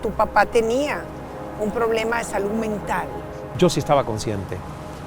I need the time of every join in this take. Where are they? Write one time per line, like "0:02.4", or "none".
0:03.5